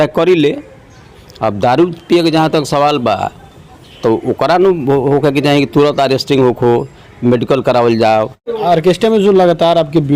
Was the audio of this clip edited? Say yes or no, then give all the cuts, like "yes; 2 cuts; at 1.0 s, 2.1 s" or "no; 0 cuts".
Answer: yes; 1 cut; at 8.4 s